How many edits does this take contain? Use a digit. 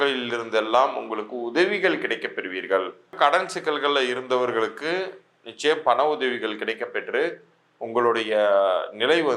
1